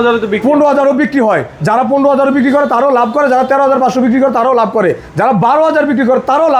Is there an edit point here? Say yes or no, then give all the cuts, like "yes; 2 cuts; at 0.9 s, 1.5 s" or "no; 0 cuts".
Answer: no; 0 cuts